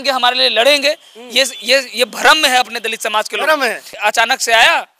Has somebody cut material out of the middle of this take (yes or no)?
yes